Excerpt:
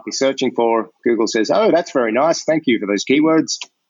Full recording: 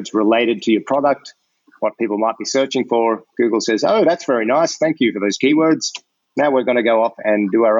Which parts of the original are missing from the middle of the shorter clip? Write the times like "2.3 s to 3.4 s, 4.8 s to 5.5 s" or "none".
none